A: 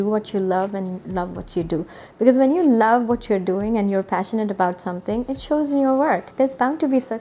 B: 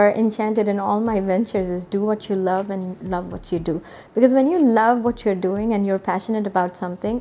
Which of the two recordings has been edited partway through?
A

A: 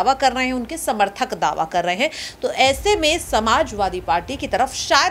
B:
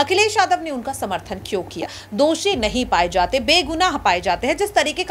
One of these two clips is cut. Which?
B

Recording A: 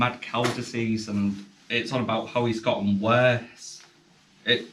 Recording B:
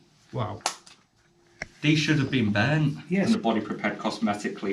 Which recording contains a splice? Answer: B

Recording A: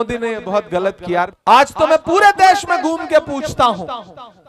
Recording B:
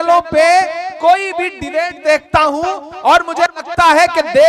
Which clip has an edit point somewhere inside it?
A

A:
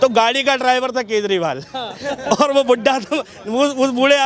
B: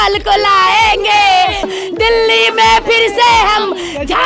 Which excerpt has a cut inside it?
B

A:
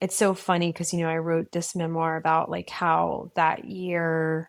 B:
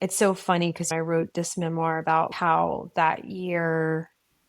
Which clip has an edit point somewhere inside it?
B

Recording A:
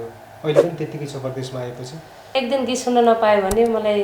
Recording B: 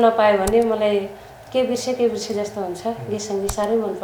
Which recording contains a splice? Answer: A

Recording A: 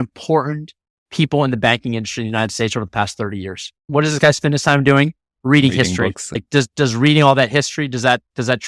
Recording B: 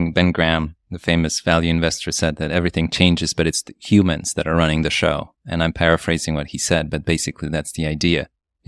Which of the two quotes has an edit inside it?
A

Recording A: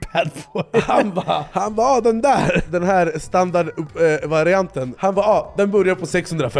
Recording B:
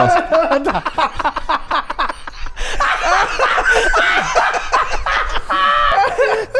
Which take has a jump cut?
A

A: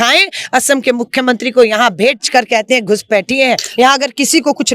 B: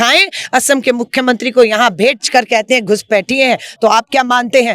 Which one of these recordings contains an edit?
A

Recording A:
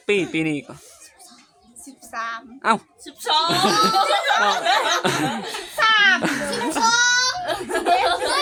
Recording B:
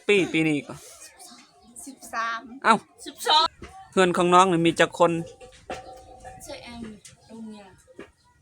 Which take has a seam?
B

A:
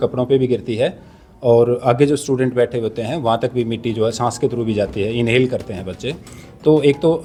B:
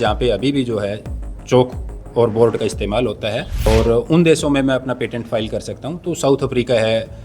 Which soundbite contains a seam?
B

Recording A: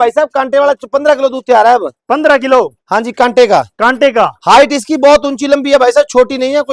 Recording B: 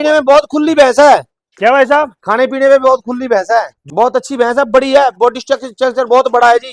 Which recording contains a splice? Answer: B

